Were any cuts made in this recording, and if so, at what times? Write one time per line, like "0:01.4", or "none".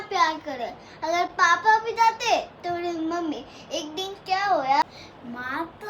0:04.8